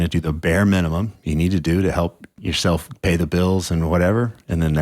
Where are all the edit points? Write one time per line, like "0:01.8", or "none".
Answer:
0:02.3